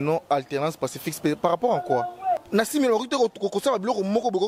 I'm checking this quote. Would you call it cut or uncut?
cut